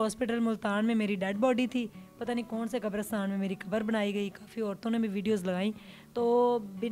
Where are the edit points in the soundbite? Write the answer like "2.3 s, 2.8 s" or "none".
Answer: none